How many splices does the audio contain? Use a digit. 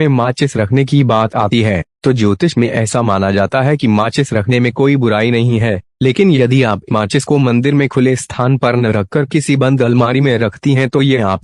1